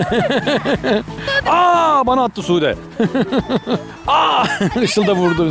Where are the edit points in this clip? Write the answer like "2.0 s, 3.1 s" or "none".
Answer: 1.3 s, 3.9 s